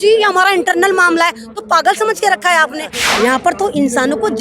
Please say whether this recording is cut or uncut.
cut